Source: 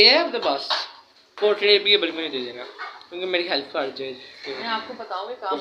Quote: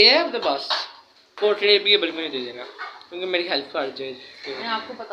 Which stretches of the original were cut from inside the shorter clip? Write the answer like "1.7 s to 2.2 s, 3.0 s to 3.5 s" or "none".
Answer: none